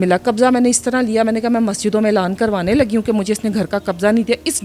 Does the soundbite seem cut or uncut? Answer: uncut